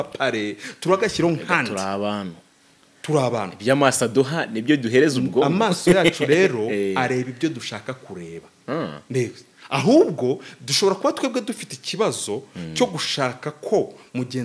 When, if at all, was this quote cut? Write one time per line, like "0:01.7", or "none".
none

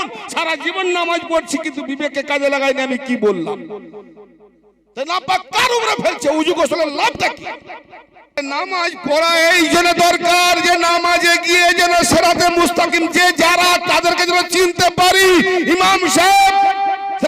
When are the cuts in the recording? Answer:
0:08.4

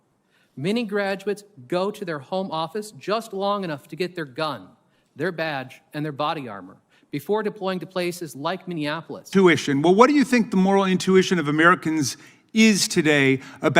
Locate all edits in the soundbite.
0:09.3

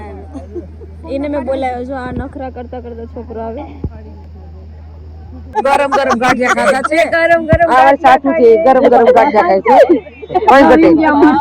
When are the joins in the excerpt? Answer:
0:05.5

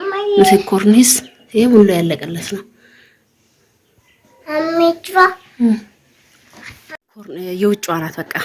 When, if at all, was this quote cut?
0:06.9

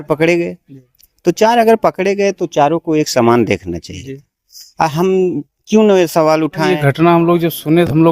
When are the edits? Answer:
0:06.7

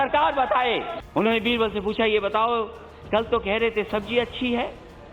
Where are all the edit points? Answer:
0:01.0

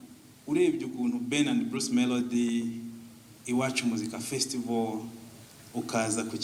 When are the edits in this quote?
none

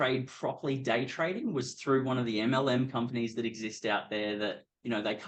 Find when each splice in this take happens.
none

